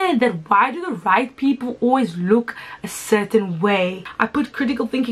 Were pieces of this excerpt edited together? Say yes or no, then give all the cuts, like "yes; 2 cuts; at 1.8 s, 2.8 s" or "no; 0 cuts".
yes; 1 cut; at 4.0 s